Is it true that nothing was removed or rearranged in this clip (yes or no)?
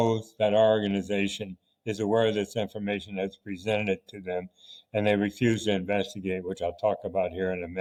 yes